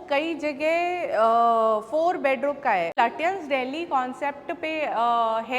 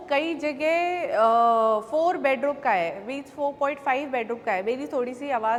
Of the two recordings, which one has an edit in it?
first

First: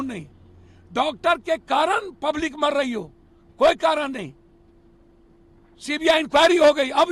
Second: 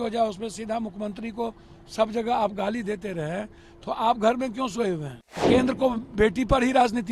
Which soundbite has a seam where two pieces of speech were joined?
second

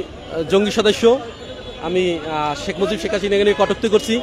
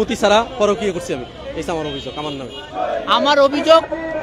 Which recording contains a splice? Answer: second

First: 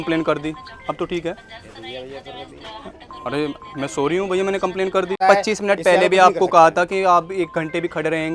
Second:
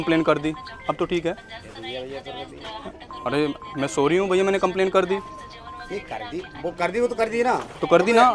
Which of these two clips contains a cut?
first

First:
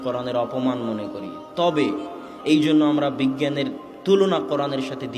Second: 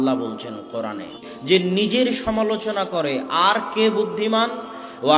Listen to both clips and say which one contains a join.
second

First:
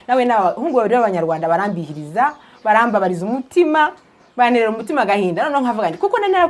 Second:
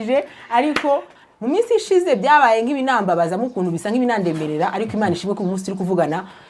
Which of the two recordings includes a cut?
second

